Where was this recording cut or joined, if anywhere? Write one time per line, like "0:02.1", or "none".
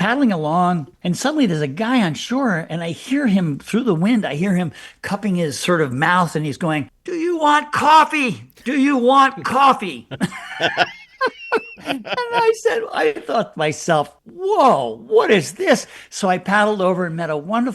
0:00.9